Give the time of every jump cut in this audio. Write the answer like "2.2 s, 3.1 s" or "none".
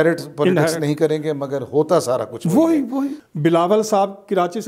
3.2 s